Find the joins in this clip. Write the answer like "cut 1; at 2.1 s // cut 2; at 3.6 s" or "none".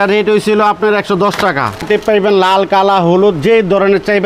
cut 1; at 1.8 s